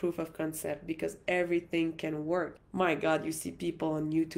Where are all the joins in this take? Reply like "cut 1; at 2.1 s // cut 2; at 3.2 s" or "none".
none